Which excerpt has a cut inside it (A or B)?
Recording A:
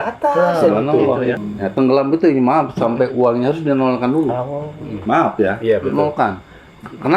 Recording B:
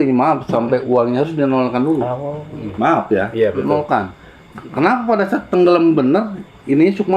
A